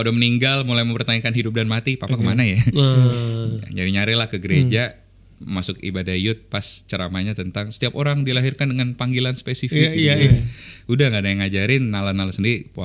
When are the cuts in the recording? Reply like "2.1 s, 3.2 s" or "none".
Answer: none